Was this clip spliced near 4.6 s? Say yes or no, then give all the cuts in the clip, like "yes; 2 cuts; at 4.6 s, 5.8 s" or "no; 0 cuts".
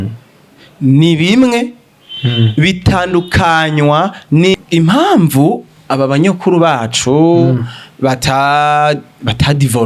yes; 1 cut; at 4.6 s